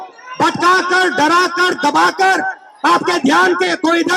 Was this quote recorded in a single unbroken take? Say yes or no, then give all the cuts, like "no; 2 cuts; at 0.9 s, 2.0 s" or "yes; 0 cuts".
yes; 0 cuts